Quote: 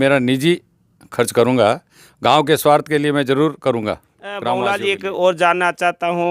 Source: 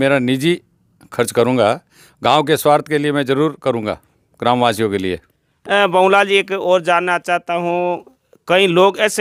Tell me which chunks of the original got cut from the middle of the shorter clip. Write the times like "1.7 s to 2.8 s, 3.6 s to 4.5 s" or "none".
4.4 s to 5.9 s